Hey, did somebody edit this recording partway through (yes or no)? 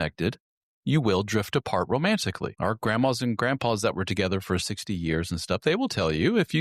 yes